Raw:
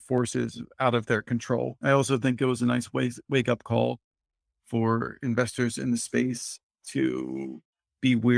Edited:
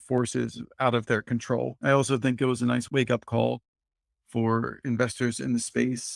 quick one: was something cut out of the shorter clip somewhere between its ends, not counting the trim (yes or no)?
yes